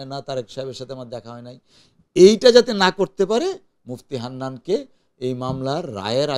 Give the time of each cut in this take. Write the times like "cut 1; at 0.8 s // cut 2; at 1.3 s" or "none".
none

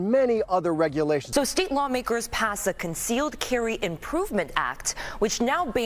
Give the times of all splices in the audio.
cut 1; at 1.2 s

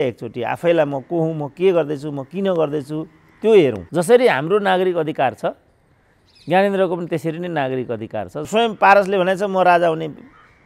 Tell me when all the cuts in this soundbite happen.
cut 1; at 3.8 s // cut 2; at 8.4 s

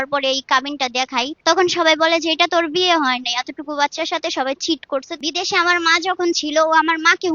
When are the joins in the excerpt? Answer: cut 1; at 1.3 s // cut 2; at 5.2 s

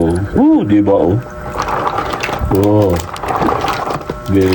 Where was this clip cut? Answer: none

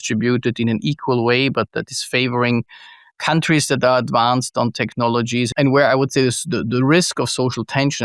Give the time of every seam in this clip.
cut 1; at 5.5 s

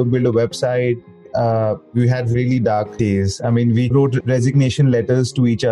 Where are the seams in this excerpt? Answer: cut 1; at 1.3 s // cut 2; at 2.9 s // cut 3; at 3.9 s

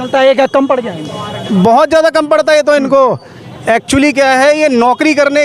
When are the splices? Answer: none

